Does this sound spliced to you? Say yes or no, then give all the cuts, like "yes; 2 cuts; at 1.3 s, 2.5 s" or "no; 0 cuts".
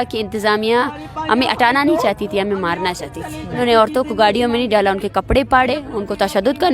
yes; 1 cut; at 3.6 s